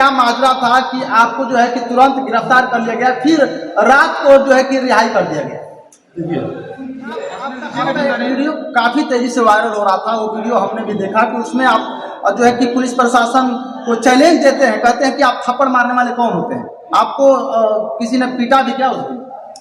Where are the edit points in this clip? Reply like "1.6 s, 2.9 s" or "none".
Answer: 7.6 s